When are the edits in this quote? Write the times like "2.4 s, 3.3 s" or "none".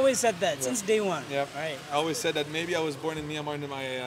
none